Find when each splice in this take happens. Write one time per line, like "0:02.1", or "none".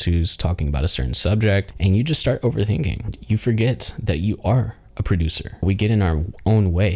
0:01.7
0:03.2
0:05.6